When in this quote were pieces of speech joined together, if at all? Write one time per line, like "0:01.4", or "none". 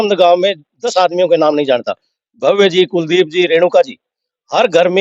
none